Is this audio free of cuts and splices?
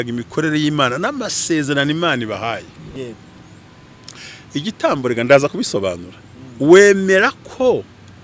no; 1 cut; at 2.9 s

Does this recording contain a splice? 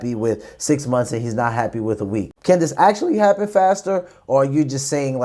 yes; 1 cut; at 2.3 s

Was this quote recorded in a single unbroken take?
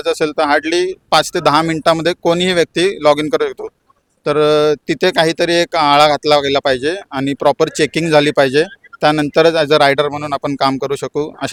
yes; 0 cuts

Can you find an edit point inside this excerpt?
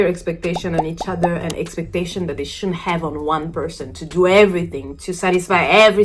no; 0 cuts

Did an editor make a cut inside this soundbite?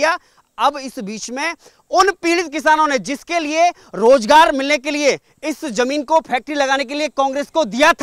no; 0 cuts

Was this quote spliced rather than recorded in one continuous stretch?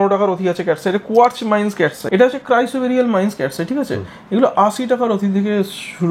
yes; 1 cut; at 2.0 s

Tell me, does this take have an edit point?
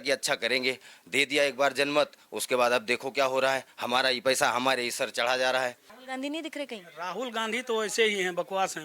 yes; 1 cut; at 5.9 s

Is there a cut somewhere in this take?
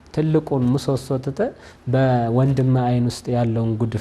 no; 0 cuts

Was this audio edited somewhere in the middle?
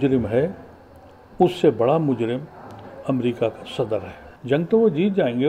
yes; 1 cut; at 4.2 s

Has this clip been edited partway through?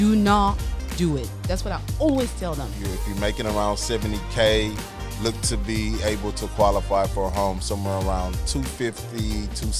no; 0 cuts

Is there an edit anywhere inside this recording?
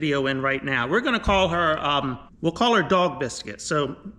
yes; 1 cut; at 2.2 s

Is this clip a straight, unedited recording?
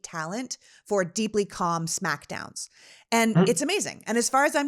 yes; 0 cuts

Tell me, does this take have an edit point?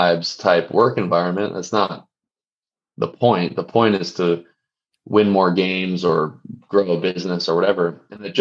no; 0 cuts

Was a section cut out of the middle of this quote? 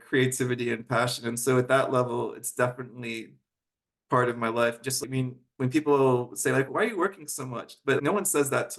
yes; 3 cuts; at 5.0 s, 6.7 s, 8.0 s

